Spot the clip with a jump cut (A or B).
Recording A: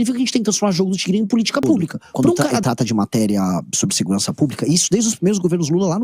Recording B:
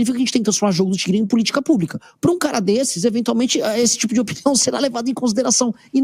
A